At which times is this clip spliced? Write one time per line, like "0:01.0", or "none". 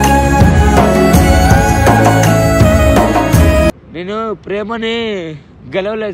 0:03.7

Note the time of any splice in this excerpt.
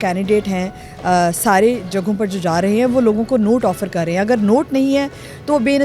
none

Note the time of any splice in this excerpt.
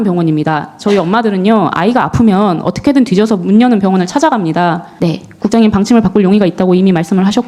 0:04.9

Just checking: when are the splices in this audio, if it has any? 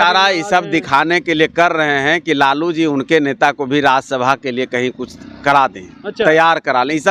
none

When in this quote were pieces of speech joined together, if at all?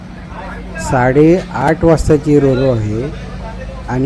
0:00.9

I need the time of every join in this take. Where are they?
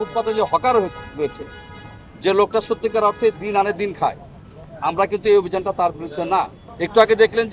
none

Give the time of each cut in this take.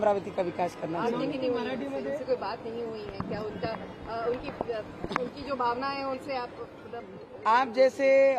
none

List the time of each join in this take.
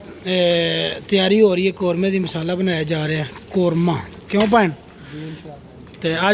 none

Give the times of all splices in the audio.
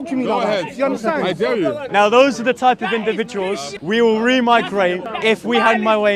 0:01.8
0:03.7
0:05.1

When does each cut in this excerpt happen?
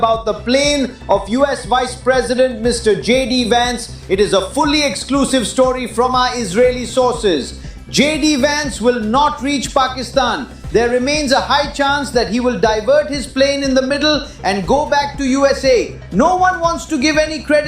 none

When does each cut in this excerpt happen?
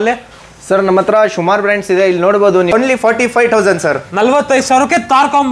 0:02.7

